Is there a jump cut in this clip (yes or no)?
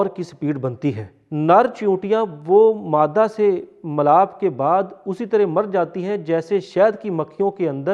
yes